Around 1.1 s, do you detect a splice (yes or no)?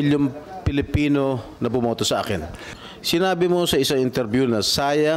no